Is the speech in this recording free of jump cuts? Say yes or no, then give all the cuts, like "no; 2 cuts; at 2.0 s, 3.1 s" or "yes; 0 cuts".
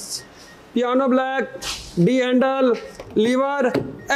yes; 0 cuts